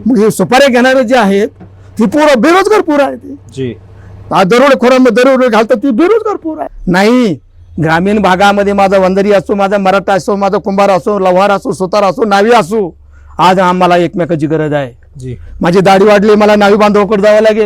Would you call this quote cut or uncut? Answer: cut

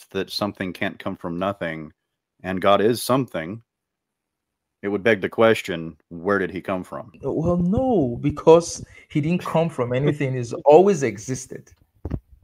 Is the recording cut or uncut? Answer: cut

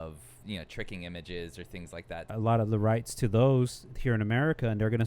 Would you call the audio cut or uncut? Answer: cut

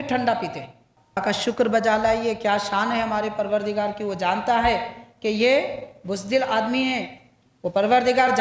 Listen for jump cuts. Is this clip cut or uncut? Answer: cut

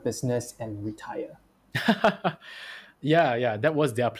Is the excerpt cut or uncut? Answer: uncut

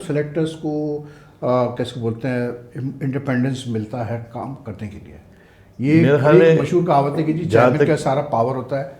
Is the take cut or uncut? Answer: uncut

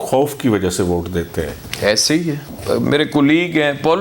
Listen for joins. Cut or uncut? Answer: cut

